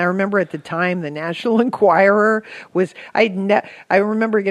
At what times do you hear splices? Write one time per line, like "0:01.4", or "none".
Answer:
0:01.0